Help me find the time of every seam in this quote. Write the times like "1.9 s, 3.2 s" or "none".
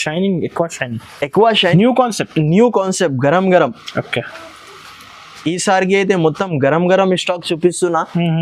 1.7 s